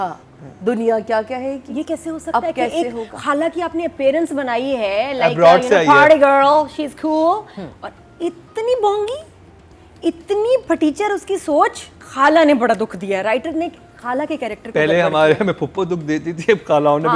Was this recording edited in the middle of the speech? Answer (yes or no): no